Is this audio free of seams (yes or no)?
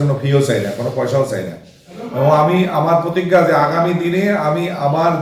yes